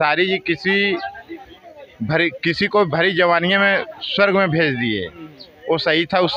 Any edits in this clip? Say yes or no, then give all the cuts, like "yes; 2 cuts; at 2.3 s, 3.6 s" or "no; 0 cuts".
no; 0 cuts